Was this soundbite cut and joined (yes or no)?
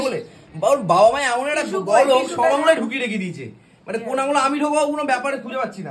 no